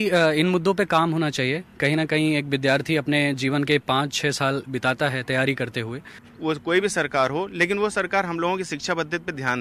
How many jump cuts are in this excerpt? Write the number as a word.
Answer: one